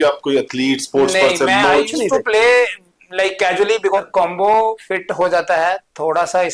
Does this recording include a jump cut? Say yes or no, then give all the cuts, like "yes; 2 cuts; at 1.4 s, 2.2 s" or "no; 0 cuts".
yes; 1 cut; at 4.0 s